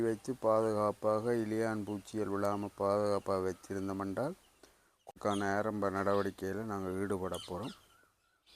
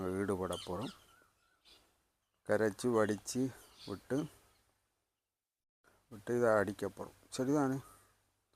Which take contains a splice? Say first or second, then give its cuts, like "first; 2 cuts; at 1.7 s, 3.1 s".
first; 1 cut; at 5.1 s